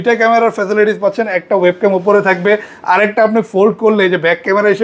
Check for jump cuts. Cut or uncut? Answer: uncut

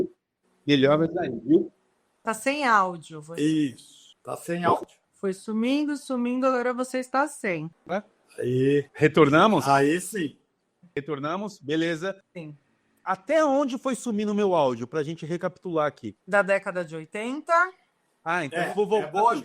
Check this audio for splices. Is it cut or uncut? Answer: cut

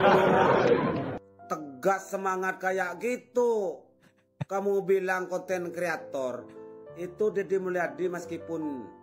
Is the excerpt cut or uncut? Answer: cut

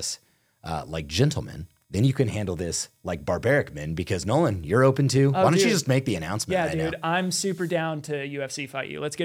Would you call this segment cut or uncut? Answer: uncut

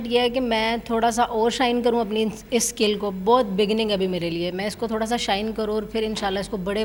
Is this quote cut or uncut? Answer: uncut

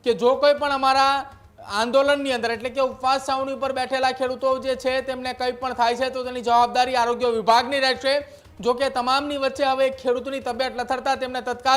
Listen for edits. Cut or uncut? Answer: uncut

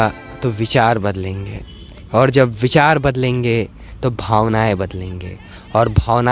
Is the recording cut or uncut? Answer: uncut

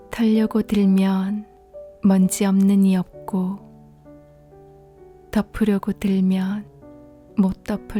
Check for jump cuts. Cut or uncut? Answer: uncut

